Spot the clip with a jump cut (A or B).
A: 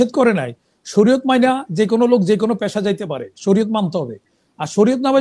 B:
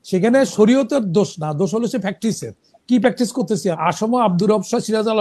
B